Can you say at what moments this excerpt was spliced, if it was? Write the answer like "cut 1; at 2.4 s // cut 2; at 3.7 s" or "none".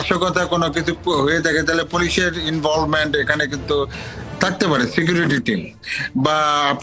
none